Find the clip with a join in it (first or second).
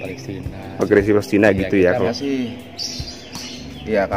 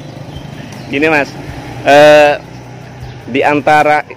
first